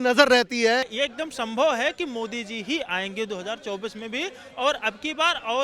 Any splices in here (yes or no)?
yes